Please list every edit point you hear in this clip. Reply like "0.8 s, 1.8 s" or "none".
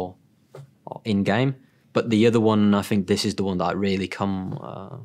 1.7 s

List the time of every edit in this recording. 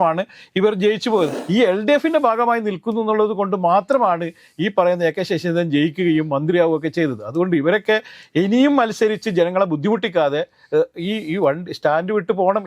1.4 s

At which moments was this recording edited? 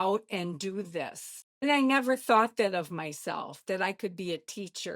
1.6 s

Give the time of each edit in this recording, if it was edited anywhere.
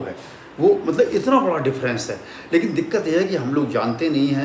none

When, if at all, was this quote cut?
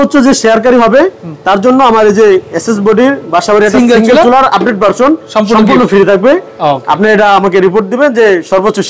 none

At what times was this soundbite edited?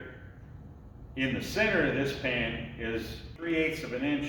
3.4 s

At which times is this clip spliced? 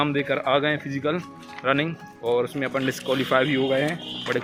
none

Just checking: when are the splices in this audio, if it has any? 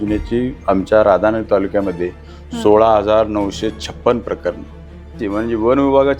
5.2 s

